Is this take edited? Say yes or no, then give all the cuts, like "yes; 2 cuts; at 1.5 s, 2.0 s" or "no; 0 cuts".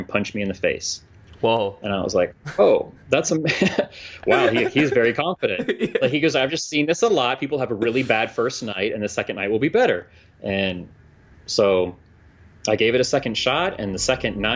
no; 0 cuts